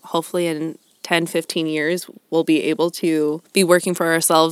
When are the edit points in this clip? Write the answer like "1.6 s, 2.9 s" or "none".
3.4 s